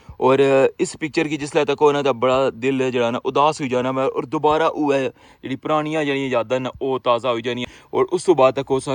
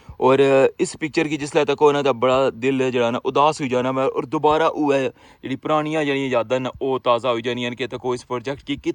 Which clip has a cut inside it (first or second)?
first